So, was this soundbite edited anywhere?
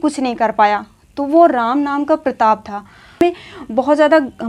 yes; 1 cut; at 3.2 s

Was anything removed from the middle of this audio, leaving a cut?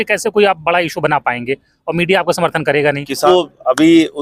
yes; 1 cut; at 3.3 s

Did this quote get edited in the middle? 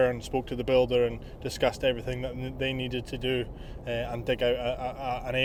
no; 0 cuts

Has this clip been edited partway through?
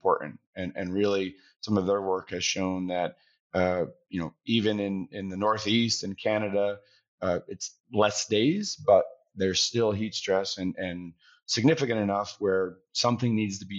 no; 0 cuts

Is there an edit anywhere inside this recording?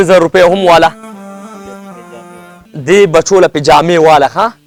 no; 0 cuts

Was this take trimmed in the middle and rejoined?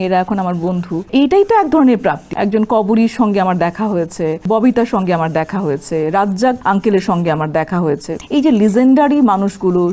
yes; 5 cuts; at 1.1 s, 2.2 s, 4.4 s, 6.6 s, 8.1 s

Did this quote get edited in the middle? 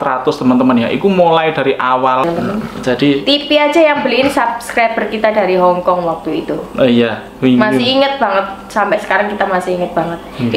yes; 1 cut; at 2.2 s

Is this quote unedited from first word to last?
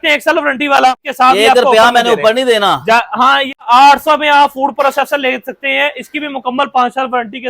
no; 2 cuts; at 1.0 s, 3.6 s

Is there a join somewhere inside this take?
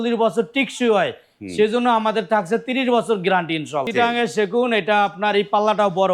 yes; 1 cut; at 3.8 s

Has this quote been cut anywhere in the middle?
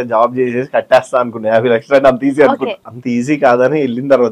yes; 1 cut; at 2.9 s

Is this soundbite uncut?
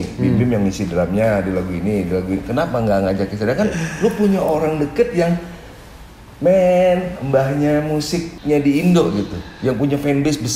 no; 1 cut; at 8.3 s

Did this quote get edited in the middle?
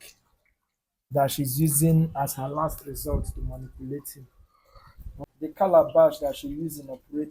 yes; 1 cut; at 5.2 s

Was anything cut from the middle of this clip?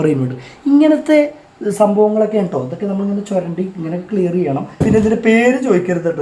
yes; 1 cut; at 4.7 s

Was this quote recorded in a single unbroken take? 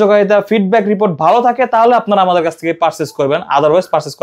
yes; 0 cuts

